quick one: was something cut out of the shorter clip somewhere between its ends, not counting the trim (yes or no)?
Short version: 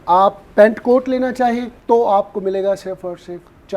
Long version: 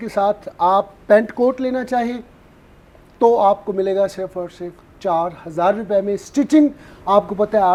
yes